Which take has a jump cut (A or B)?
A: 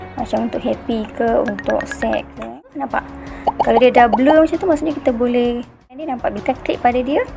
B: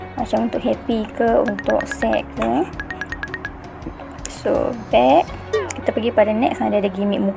A